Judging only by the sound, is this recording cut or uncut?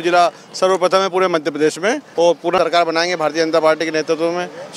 uncut